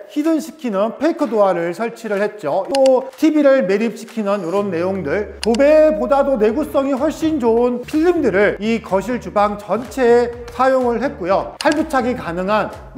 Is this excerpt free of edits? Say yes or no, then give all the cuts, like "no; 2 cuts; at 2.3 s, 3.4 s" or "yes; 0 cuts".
yes; 0 cuts